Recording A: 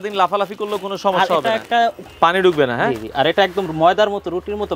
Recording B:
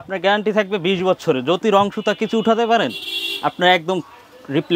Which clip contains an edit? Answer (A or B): A